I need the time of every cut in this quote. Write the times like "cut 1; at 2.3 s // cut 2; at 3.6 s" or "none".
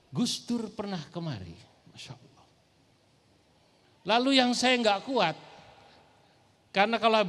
none